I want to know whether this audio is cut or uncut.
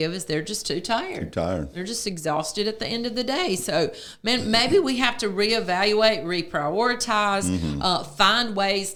uncut